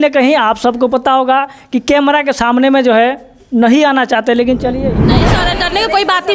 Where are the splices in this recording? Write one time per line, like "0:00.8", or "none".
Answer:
0:05.1